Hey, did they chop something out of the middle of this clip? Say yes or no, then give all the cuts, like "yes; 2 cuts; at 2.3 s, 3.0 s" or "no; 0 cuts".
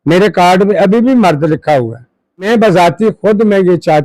yes; 1 cut; at 2.5 s